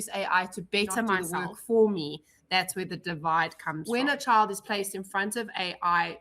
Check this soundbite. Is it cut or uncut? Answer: cut